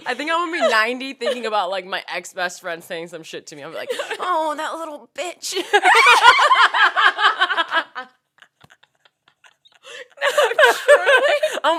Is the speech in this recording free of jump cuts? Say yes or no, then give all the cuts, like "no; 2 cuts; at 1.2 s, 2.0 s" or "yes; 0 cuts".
yes; 0 cuts